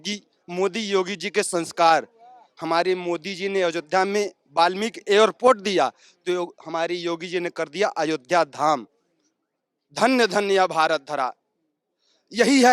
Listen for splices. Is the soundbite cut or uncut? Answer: uncut